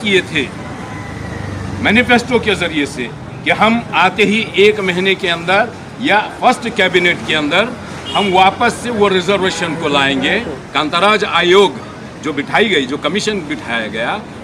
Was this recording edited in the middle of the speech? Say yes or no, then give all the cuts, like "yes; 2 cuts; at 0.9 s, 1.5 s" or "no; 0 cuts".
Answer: yes; 1 cut; at 10.6 s